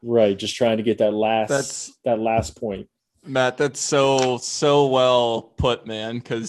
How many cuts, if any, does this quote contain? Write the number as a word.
zero